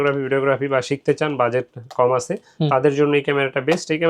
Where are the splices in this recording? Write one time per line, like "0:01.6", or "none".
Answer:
none

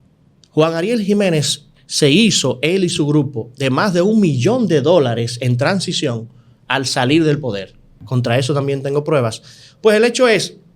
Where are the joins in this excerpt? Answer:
0:08.0

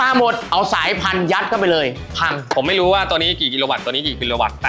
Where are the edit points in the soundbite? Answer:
0:02.5

